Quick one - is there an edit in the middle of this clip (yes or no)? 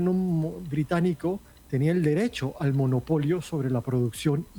yes